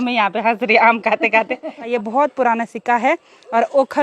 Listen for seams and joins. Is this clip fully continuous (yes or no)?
no